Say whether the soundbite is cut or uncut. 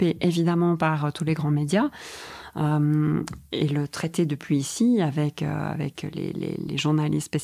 uncut